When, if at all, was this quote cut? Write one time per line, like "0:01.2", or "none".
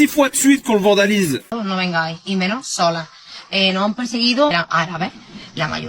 0:01.5